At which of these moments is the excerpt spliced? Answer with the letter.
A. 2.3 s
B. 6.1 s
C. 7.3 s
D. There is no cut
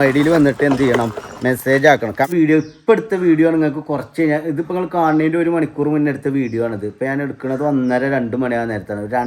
A